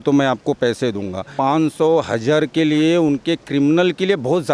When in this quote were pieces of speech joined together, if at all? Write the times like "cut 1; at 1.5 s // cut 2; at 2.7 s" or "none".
cut 1; at 1.3 s